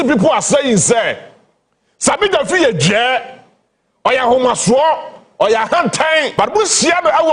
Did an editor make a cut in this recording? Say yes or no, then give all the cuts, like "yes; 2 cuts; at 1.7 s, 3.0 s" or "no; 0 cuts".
yes; 1 cut; at 6.3 s